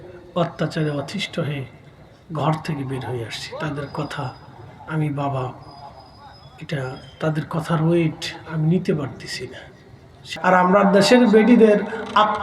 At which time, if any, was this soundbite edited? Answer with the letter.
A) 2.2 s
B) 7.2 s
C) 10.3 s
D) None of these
C